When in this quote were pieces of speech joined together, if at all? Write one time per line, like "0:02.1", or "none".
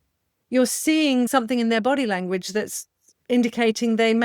0:01.3